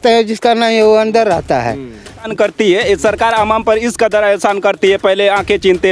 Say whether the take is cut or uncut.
cut